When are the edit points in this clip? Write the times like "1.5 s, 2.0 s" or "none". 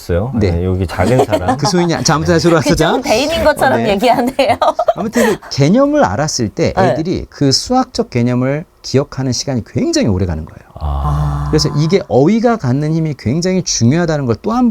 none